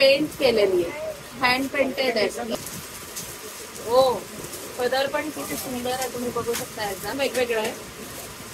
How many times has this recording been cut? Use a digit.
2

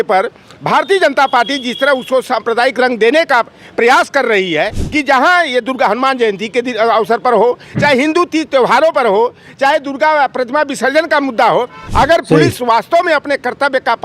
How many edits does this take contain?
2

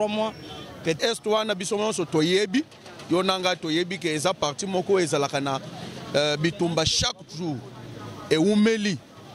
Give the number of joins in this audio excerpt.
1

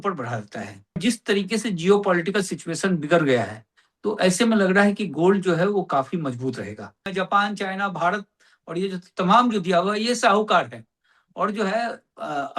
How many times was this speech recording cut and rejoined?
2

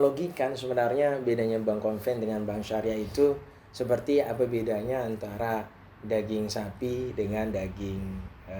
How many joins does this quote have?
0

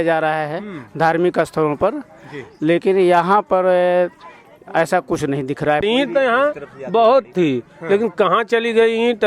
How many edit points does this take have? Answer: 1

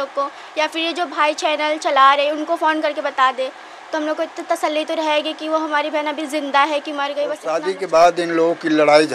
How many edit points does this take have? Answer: 1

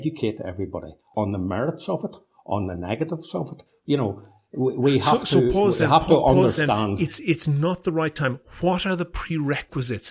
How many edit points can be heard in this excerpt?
1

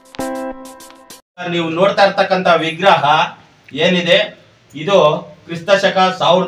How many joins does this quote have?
1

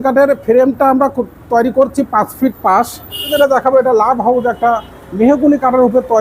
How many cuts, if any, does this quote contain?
1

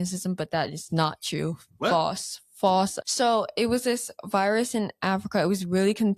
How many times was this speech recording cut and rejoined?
1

